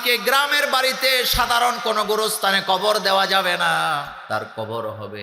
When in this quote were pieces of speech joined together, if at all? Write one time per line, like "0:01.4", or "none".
0:04.1